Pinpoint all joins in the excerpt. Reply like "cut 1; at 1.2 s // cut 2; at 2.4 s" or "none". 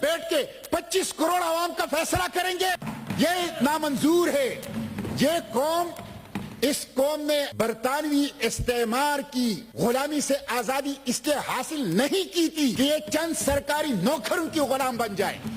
cut 1; at 2.9 s // cut 2; at 7.5 s // cut 3; at 9.7 s // cut 4; at 12.7 s